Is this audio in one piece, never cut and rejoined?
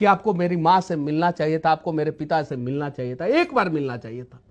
yes; 0 cuts

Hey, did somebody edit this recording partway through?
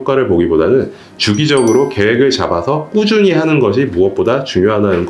no; 0 cuts

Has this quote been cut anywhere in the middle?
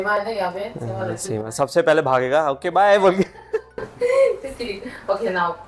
no; 0 cuts

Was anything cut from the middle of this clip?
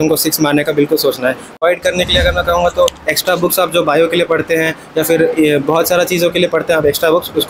yes; 1 cut; at 1.6 s

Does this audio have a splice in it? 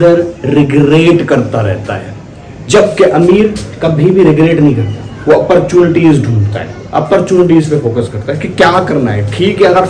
no; 0 cuts

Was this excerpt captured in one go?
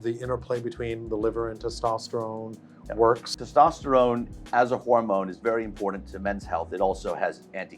no; 1 cut; at 3.4 s

